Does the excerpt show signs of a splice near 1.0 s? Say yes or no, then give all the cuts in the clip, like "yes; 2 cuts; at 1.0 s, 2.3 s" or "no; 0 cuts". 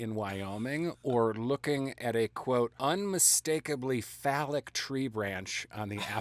no; 1 cut; at 2.7 s